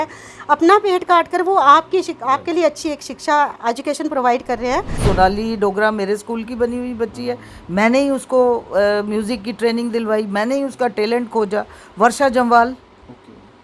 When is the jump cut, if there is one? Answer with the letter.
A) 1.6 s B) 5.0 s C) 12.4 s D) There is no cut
B